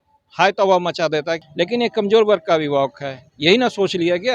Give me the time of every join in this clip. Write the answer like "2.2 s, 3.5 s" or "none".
1.4 s